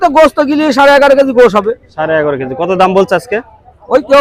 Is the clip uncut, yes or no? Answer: yes